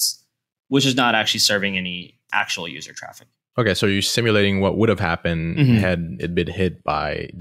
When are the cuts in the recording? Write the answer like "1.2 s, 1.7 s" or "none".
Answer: none

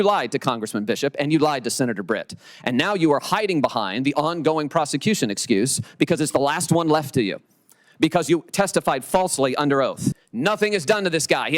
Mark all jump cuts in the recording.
10.3 s

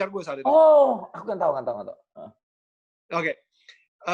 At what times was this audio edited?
none

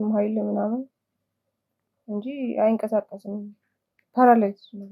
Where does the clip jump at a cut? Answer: none

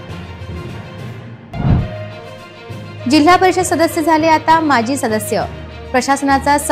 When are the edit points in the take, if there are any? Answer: 0.9 s

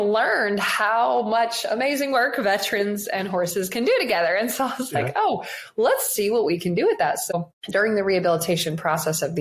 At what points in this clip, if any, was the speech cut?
7.2 s

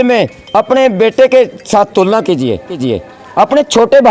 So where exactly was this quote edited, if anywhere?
none

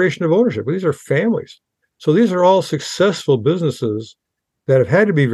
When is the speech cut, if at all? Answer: none

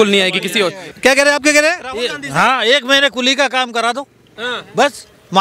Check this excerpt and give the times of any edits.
0.9 s

